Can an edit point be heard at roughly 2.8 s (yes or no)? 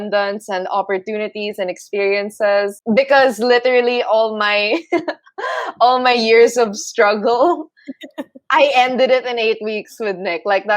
yes